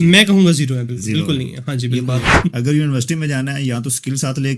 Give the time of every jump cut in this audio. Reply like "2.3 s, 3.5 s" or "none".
2.3 s